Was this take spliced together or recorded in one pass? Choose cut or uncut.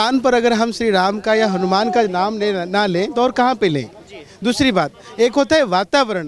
uncut